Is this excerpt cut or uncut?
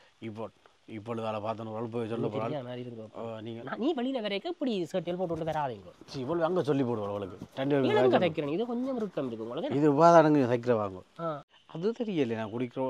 cut